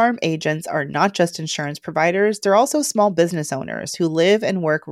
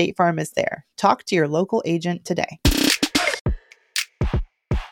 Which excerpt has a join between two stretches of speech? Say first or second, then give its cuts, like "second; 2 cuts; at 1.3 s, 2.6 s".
second; 1 cut; at 3.4 s